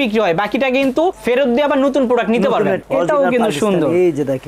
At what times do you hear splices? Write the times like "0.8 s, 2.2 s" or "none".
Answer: 2.8 s